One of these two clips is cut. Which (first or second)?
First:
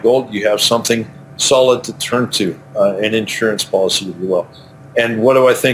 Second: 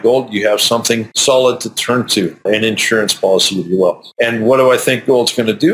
second